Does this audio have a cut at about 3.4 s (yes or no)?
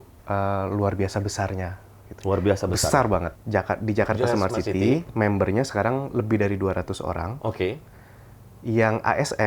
yes